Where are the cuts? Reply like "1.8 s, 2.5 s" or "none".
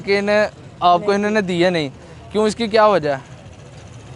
none